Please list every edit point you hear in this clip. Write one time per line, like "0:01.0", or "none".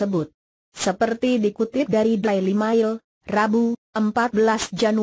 0:02.3